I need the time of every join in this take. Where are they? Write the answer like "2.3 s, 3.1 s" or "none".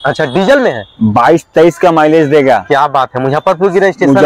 none